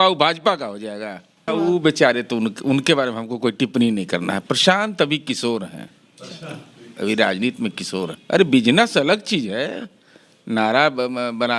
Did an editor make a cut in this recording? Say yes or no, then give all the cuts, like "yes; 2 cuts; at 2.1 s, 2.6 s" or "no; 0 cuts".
yes; 2 cuts; at 1.4 s, 8.2 s